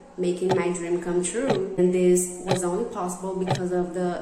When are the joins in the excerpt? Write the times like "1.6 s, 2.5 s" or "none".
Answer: 1.7 s